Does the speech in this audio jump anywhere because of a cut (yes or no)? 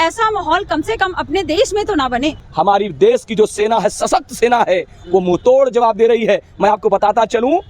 yes